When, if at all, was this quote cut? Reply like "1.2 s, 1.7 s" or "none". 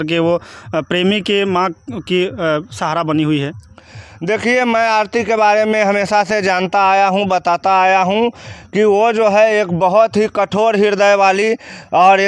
none